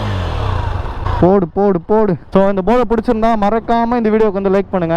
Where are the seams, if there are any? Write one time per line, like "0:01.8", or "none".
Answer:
0:01.0
0:02.2